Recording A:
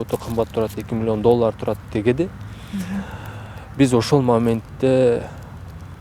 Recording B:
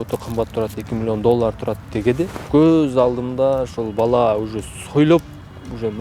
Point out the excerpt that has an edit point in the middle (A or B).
B